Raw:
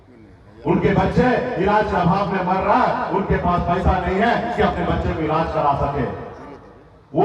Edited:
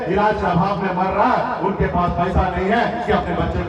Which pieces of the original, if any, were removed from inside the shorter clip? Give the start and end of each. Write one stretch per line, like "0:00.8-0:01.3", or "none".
none